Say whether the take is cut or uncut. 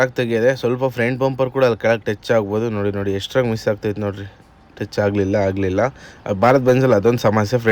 uncut